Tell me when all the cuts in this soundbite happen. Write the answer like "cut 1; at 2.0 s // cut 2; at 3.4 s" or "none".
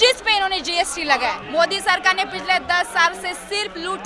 cut 1; at 1.4 s